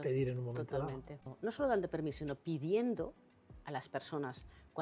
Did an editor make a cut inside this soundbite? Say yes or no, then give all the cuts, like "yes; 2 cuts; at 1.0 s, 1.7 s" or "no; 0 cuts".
yes; 1 cut; at 1.2 s